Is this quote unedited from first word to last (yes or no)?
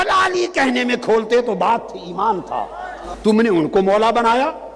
no